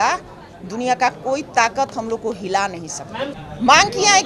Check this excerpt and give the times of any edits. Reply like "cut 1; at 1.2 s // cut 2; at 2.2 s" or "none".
cut 1; at 3.3 s